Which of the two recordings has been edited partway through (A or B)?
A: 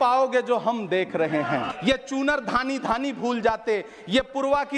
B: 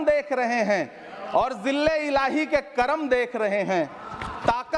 A